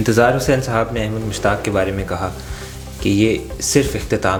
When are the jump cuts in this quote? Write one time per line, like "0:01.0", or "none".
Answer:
none